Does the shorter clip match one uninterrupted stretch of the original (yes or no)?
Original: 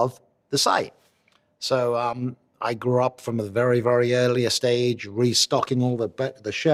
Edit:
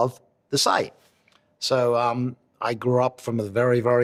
yes